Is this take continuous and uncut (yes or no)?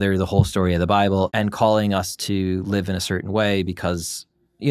no